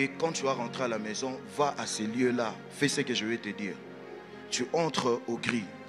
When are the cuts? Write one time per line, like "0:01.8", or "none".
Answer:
none